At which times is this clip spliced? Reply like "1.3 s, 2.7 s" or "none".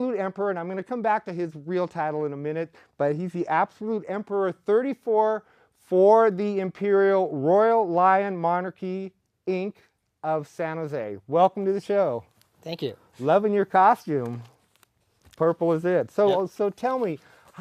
none